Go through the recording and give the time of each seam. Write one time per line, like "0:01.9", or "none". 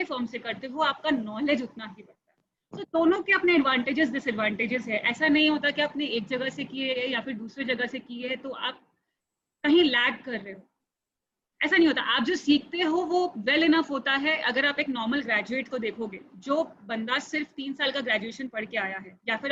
none

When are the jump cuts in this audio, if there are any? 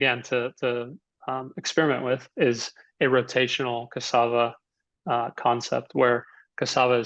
none

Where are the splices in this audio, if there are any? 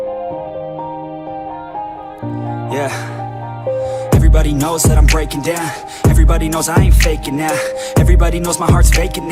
0:02.2

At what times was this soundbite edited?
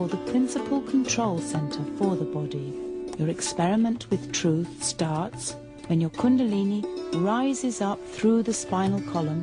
0:06.9

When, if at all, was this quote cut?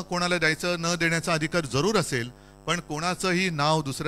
none

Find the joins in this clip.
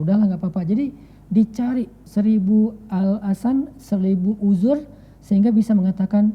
0:02.0

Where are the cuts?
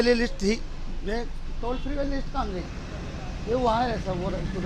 none

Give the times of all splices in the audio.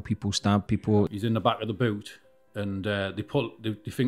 0:01.1

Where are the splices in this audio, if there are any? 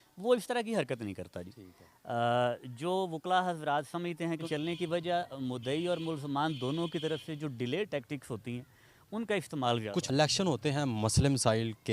0:04.4
0:10.1

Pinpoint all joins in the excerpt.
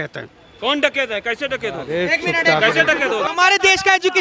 0:03.3

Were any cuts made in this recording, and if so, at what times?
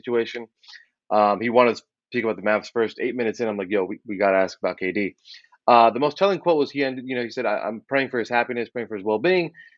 none

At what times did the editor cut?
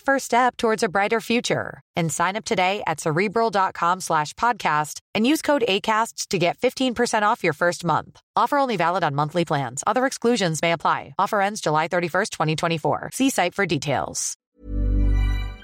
0:14.5

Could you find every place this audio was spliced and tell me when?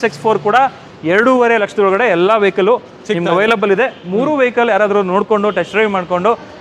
none

